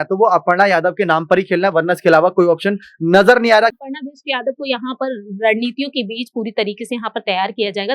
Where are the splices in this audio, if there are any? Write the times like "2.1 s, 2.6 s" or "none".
3.9 s